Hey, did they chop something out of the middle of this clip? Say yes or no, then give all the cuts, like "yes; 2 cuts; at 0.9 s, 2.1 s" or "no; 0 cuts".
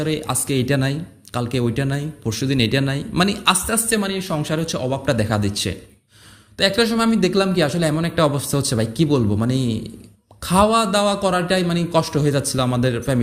no; 0 cuts